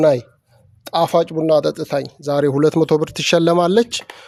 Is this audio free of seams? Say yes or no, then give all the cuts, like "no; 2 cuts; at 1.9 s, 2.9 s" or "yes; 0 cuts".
yes; 0 cuts